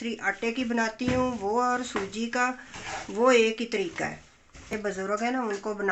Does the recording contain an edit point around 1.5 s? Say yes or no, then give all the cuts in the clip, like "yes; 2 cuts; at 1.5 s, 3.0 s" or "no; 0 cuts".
no; 1 cut; at 5.0 s